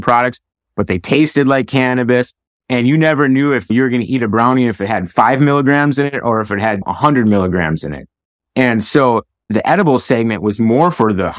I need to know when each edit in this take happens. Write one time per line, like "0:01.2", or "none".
0:03.7